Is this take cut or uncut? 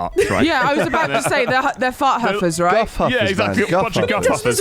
uncut